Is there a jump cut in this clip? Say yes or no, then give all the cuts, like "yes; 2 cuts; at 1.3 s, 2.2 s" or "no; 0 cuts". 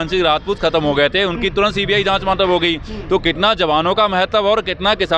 no; 0 cuts